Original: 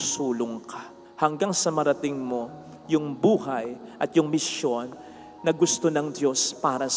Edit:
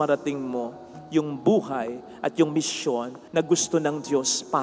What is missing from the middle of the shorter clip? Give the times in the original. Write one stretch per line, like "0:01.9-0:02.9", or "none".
0:04.9-0:05.3